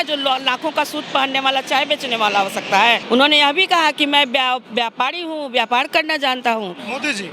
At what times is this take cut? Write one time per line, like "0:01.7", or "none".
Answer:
0:03.0